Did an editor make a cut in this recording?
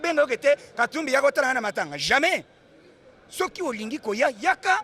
no; 0 cuts

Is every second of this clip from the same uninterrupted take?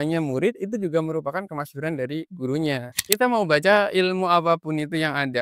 no; 1 cut; at 2.9 s

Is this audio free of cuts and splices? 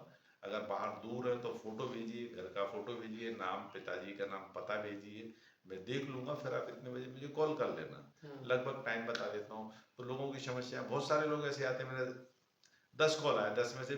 yes; 0 cuts

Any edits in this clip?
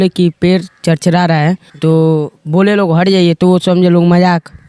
yes; 1 cut; at 1.7 s

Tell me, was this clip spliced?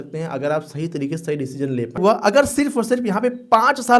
yes; 1 cut; at 2.0 s

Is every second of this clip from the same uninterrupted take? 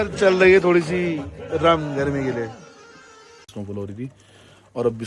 no; 1 cut; at 3.5 s

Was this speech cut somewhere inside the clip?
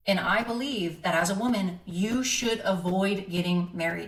no; 0 cuts

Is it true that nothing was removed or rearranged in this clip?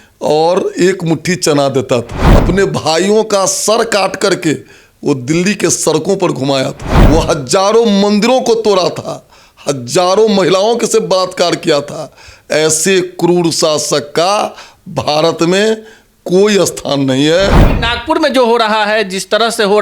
no; 3 cuts; at 2.2 s, 6.9 s, 17.7 s

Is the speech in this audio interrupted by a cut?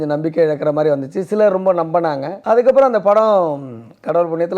yes; 1 cut; at 2.3 s

